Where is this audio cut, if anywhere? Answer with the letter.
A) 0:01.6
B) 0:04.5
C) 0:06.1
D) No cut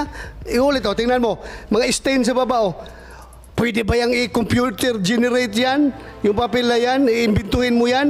D